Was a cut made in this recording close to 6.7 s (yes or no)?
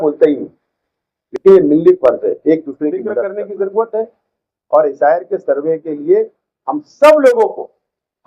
no